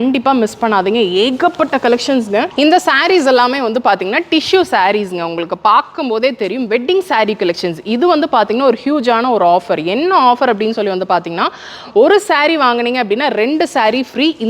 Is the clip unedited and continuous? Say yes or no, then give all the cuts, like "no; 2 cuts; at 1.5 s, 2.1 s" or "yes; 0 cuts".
no; 1 cut; at 2.6 s